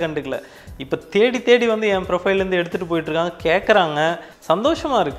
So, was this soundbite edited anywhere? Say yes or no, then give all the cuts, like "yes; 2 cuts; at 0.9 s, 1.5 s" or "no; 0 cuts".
yes; 1 cut; at 4.3 s